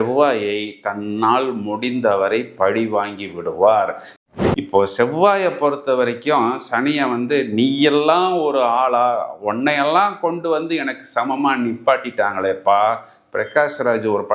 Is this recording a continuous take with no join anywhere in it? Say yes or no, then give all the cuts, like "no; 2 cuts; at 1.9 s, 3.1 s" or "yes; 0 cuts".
no; 1 cut; at 4.2 s